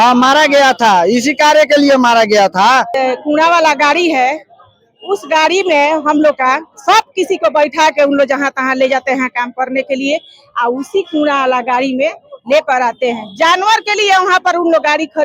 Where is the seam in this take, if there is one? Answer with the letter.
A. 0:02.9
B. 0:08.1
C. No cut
A